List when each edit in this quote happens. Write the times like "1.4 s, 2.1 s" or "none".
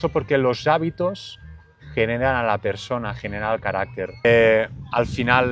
4.2 s